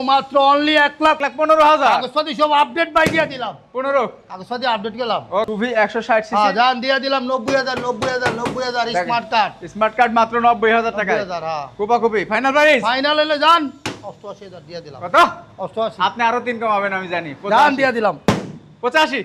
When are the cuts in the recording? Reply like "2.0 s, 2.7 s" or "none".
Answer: 1.3 s, 5.5 s

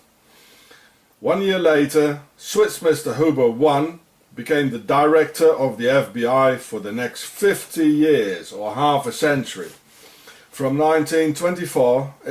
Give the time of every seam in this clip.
0.9 s

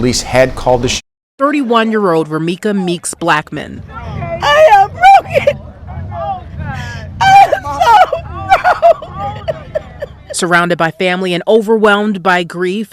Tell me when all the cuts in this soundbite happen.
1.2 s

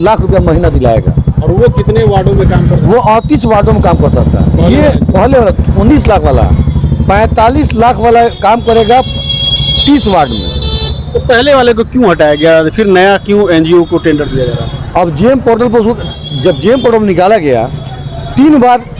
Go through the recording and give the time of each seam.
none

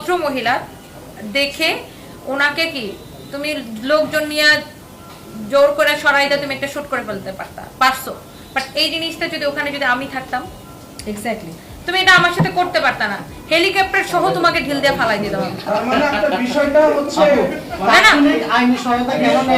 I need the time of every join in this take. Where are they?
none

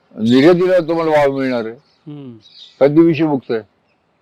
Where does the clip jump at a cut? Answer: none

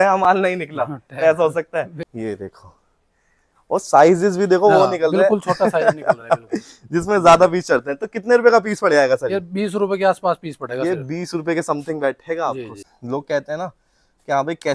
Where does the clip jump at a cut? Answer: 2.0 s, 12.7 s

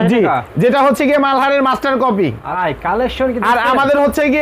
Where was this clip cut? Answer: 2.5 s

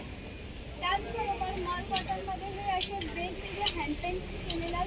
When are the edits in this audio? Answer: none

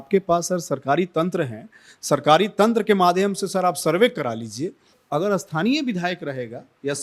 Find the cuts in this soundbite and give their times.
4.9 s

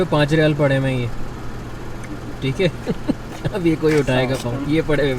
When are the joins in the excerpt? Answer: none

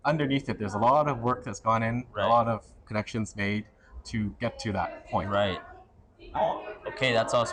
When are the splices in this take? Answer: none

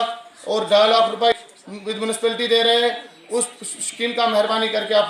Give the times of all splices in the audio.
1.5 s

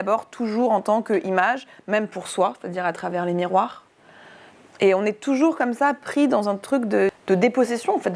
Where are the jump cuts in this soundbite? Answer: 7.2 s

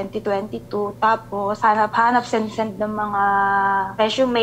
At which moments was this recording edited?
none

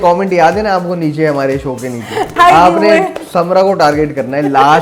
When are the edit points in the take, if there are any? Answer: 2.4 s

